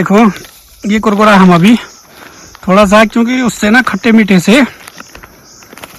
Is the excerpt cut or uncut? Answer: uncut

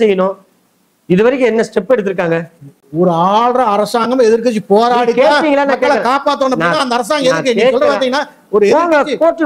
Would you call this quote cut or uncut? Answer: uncut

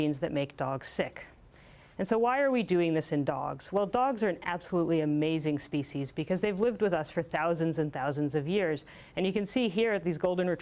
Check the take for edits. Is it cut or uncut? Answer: cut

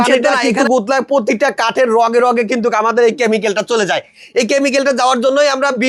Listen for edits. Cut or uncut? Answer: uncut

